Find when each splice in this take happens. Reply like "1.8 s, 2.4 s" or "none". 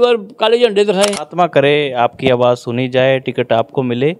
1.2 s